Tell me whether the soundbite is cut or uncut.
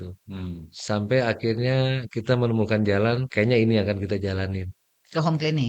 cut